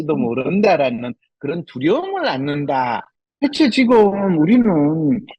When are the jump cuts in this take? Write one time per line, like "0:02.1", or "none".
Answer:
0:03.1